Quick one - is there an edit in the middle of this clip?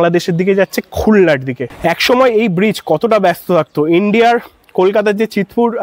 yes; 1 cut; at 1.7 s

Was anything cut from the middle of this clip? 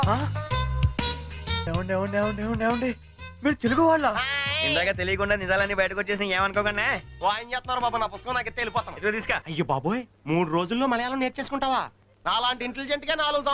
yes; 3 cuts; at 1.7 s, 7.1 s, 9.5 s

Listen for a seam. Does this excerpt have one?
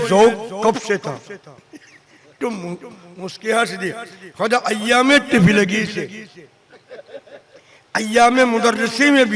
no; 0 cuts

